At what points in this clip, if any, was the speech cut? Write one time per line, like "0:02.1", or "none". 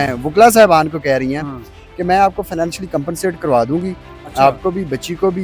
none